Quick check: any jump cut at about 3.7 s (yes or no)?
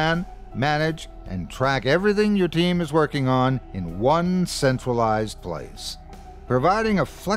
no